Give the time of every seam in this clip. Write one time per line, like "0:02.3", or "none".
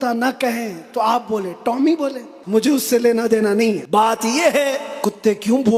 0:02.3
0:03.8
0:04.9